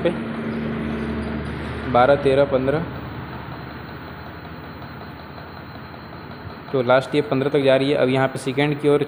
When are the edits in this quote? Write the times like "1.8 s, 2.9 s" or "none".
none

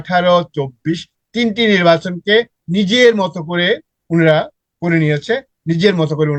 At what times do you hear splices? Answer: none

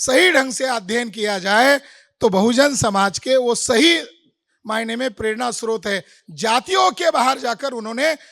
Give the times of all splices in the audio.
none

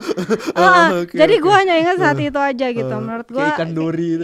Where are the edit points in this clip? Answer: none

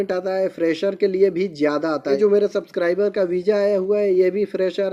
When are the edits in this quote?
2.2 s

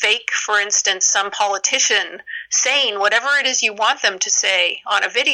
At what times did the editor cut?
none

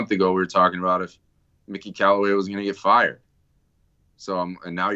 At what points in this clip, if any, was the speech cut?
none

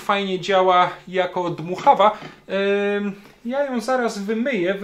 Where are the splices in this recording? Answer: none

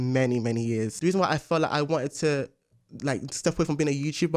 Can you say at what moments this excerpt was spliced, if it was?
0.9 s

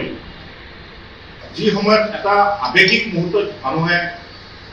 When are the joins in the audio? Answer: 1.5 s

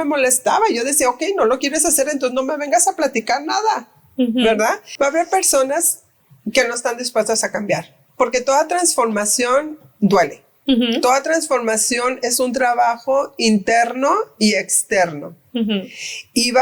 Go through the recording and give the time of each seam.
4.9 s

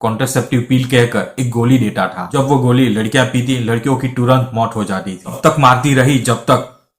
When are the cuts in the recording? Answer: 2.2 s, 5.4 s

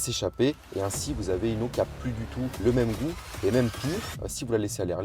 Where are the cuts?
2.6 s

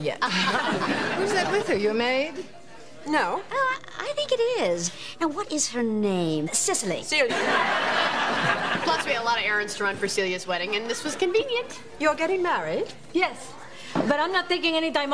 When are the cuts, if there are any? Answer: none

